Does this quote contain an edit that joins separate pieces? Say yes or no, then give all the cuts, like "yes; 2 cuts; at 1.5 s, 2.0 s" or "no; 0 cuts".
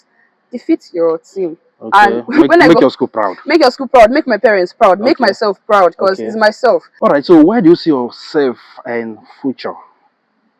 no; 0 cuts